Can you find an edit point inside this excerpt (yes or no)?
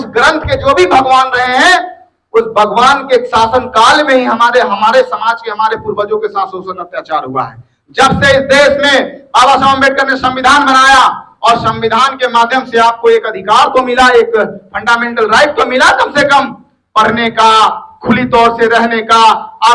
no